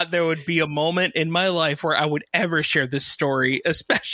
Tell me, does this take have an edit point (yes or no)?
no